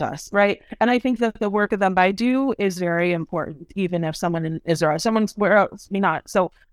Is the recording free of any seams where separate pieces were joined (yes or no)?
no